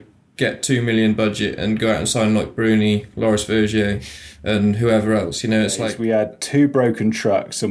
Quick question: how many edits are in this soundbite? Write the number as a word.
one